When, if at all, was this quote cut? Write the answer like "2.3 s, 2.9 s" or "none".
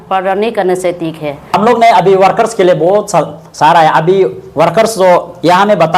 1.5 s